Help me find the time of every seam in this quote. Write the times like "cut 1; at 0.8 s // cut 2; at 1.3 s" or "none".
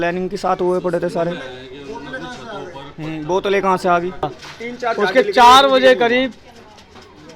cut 1; at 4.3 s